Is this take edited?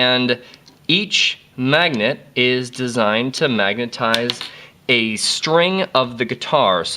yes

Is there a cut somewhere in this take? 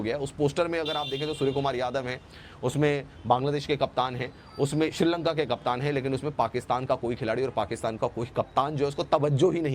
no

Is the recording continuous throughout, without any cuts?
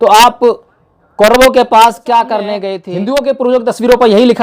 no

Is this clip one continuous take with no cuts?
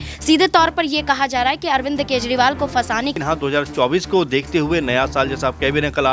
no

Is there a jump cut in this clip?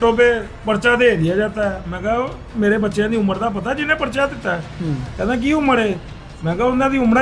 no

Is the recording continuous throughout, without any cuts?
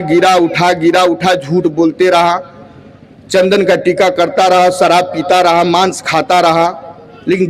yes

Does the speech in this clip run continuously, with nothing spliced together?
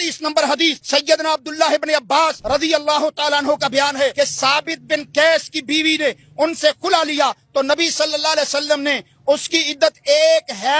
no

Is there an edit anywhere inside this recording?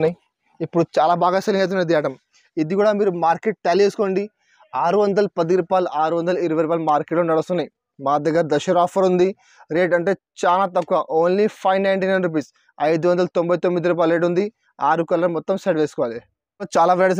no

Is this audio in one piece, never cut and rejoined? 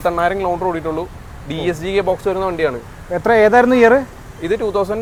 yes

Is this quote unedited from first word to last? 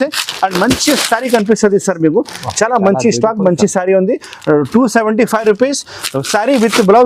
yes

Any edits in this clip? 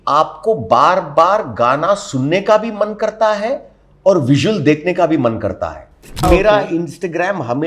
yes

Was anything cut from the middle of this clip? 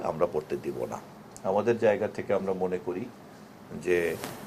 yes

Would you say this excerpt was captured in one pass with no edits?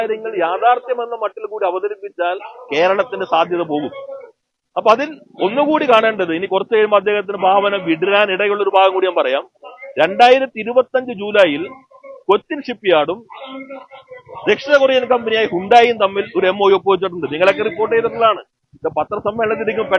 yes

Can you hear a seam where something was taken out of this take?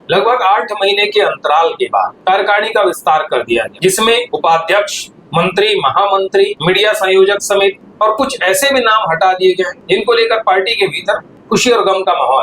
yes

